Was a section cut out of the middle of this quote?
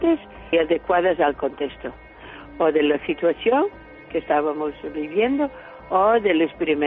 no; 0 cuts

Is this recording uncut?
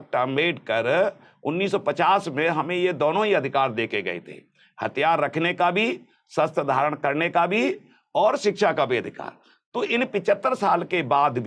yes; 0 cuts

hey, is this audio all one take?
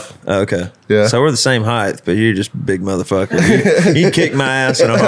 yes; 0 cuts

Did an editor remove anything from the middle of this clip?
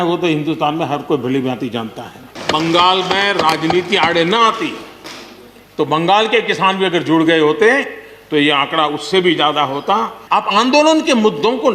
yes; 2 cuts; at 2.4 s, 10.2 s

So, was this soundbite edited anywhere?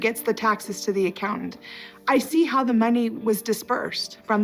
no; 0 cuts

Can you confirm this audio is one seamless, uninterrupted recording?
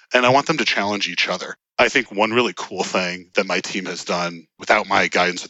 no; 3 cuts; at 1.6 s, 3.3 s, 4.5 s

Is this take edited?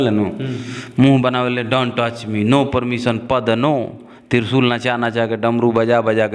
no; 0 cuts

